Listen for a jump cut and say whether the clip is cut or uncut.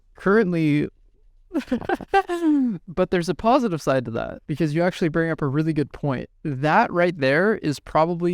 cut